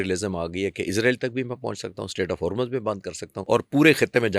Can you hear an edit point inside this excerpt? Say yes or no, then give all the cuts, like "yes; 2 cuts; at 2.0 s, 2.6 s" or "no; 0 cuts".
yes; 1 cut; at 3.3 s